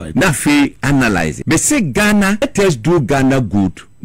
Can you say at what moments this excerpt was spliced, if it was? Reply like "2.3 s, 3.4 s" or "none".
1.4 s, 2.4 s